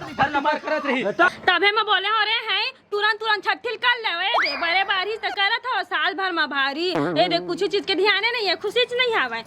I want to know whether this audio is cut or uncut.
cut